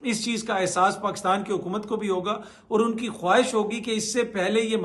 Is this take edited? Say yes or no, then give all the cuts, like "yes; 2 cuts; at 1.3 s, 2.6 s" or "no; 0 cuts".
no; 0 cuts